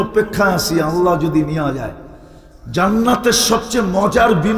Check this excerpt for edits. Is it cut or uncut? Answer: uncut